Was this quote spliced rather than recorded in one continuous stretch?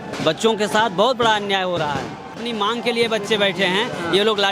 yes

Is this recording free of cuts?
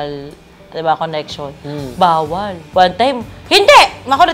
no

